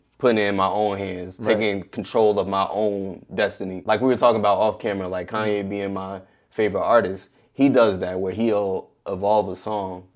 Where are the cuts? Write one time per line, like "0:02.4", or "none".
0:03.8